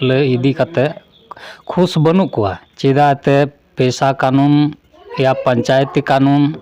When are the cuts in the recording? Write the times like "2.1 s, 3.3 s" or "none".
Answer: 2.7 s

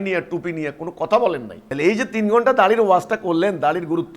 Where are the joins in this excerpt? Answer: 1.6 s

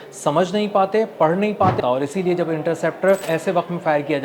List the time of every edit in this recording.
1.8 s, 3.2 s

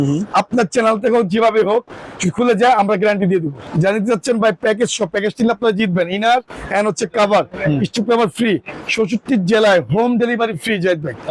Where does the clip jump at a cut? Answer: 3.6 s

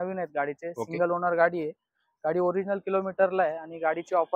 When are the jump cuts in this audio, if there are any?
none

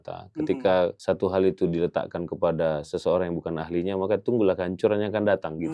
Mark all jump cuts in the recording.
1.0 s

